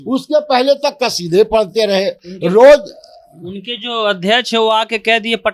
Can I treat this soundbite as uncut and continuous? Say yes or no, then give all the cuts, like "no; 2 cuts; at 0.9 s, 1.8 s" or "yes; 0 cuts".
yes; 0 cuts